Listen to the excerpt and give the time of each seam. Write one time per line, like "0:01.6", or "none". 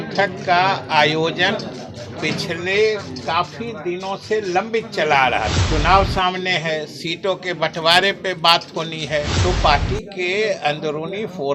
0:05.6
0:09.3